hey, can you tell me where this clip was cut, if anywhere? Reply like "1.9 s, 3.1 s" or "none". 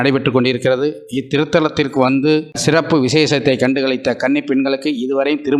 2.5 s